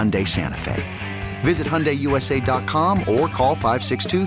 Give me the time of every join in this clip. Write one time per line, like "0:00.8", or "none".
none